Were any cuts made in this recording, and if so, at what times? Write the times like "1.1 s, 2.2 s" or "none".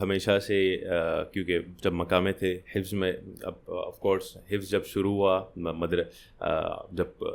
none